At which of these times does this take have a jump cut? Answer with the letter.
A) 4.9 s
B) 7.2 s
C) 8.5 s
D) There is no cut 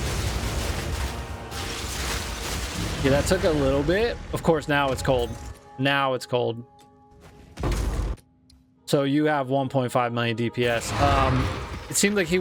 D